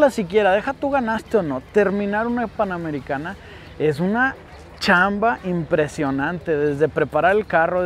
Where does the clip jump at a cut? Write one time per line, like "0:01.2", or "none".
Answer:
none